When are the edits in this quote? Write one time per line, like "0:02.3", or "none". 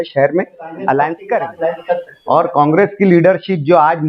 0:02.1